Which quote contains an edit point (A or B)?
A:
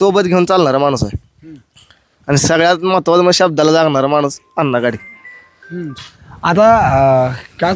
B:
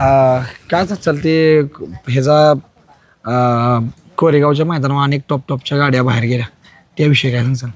A